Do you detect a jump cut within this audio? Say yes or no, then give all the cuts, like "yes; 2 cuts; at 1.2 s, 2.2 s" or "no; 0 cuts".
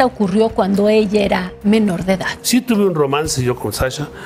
yes; 1 cut; at 2.4 s